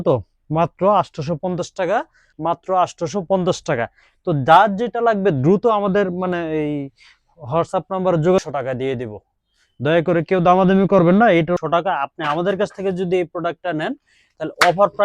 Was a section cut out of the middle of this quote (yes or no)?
yes